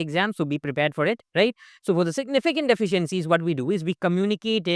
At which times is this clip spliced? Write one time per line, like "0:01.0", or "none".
0:01.7